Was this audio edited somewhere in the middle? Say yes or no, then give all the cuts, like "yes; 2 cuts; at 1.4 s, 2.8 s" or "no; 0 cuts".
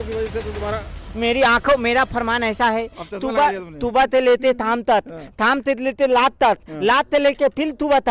no; 0 cuts